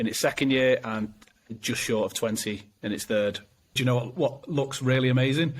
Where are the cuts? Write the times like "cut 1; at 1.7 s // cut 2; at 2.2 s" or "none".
cut 1; at 3.8 s